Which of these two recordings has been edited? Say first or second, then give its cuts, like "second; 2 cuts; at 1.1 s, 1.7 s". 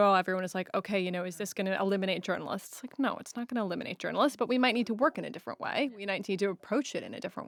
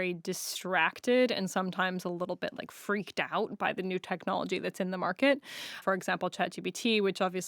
second; 1 cut; at 5.8 s